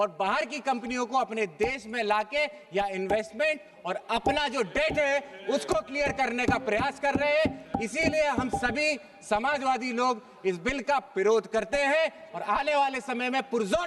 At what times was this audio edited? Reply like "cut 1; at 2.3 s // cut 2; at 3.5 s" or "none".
none

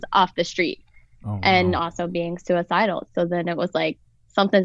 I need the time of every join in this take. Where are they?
none

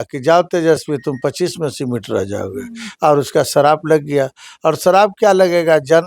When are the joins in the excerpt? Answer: none

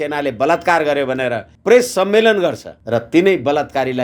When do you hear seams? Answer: cut 1; at 1.5 s // cut 2; at 2.7 s

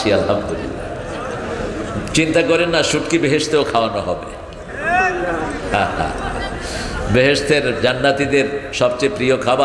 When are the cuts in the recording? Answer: none

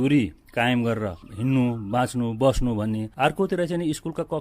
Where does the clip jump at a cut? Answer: cut 1; at 1.2 s // cut 2; at 3.1 s

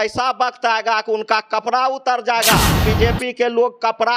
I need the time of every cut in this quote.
cut 1; at 2.8 s

